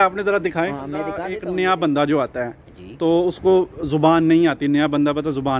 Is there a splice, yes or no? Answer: yes